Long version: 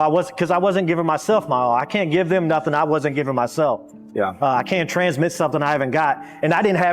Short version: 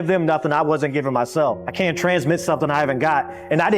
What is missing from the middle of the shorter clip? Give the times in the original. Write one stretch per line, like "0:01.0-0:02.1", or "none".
0:04.0-0:04.7